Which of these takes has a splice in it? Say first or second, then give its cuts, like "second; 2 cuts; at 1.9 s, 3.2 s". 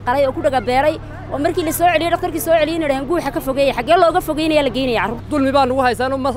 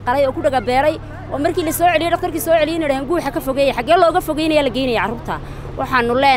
first; 1 cut; at 5.2 s